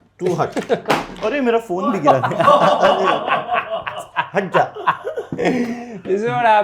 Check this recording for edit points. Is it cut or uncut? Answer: uncut